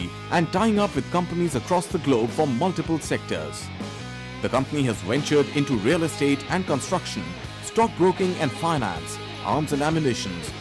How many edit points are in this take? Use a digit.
0